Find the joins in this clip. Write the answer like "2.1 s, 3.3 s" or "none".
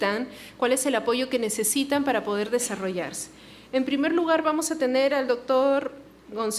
none